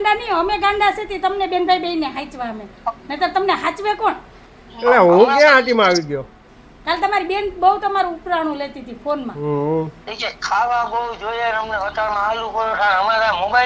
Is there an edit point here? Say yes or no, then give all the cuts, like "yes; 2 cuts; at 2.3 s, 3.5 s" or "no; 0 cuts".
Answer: no; 0 cuts